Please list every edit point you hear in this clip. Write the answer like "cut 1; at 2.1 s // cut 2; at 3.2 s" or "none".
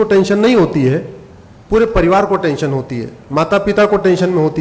none